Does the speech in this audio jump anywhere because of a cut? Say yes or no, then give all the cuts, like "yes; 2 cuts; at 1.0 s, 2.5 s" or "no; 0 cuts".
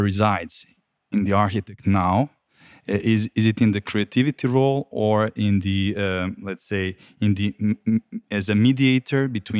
no; 0 cuts